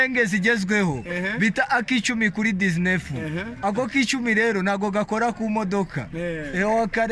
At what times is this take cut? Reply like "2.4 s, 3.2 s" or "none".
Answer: none